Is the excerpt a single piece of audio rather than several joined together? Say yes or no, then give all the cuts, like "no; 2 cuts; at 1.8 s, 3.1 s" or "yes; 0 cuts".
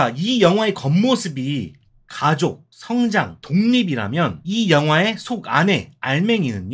no; 3 cuts; at 2.7 s, 3.4 s, 4.4 s